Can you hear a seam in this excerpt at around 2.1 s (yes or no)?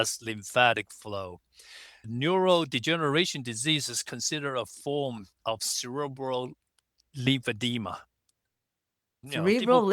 yes